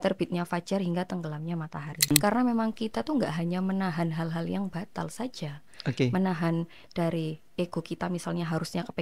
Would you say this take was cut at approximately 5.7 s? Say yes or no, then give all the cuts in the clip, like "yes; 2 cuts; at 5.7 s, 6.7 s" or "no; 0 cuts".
no; 1 cut; at 2.1 s